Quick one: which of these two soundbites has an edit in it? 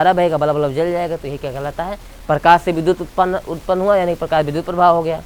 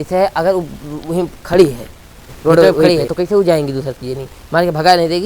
second; 1 cut; at 2.8 s

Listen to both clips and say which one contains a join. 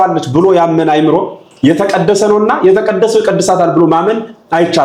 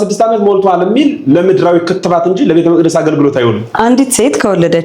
second; 1 cut; at 3.7 s

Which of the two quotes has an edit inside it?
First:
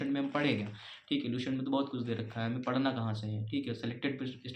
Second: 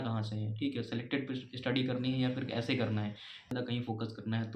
second; 1 cut; at 3.5 s

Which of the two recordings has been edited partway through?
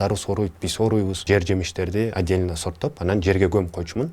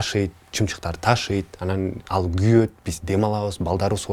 first; 1 cut; at 1.2 s

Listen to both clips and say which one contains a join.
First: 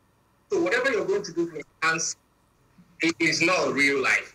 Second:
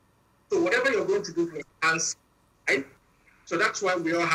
first; 1 cut; at 2.5 s

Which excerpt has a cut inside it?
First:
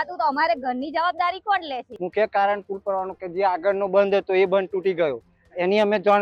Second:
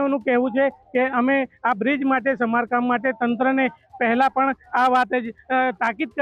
first; 1 cut; at 1.9 s

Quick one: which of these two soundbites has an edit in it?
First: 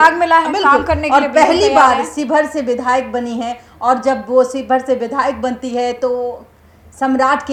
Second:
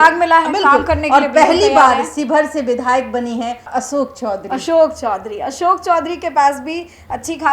second; 1 cut; at 3.7 s

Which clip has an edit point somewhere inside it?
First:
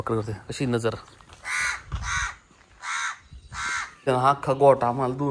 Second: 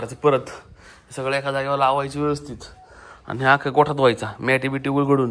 first; 1 cut; at 4.0 s

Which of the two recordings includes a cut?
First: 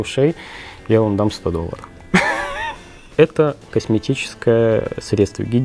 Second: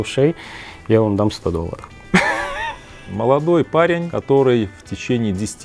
second; 1 cut; at 3.0 s

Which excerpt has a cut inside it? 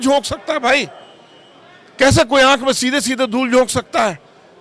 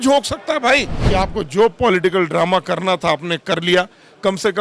second; 1 cut; at 1.0 s

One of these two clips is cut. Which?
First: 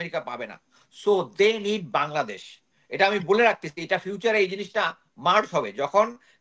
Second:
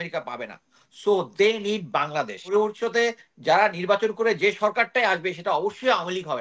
second; 1 cut; at 2.5 s

